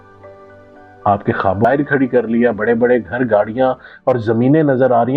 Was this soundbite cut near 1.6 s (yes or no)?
yes